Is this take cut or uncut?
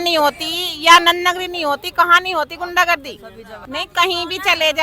cut